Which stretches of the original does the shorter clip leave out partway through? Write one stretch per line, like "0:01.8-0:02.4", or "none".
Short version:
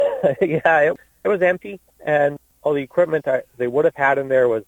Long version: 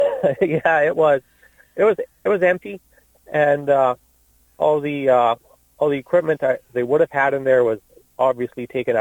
0:01.0-0:02.0
0:03.3-0:05.4